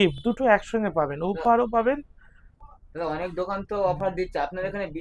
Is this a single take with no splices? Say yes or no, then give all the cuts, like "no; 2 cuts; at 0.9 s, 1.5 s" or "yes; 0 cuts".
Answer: yes; 0 cuts